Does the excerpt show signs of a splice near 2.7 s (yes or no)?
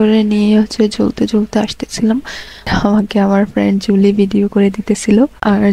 yes